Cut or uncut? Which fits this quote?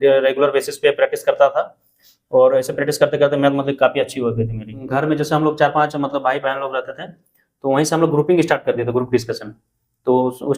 cut